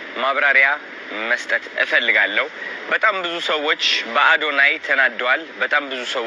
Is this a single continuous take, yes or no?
yes